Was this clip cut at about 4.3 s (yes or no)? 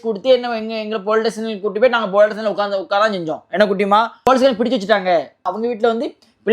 yes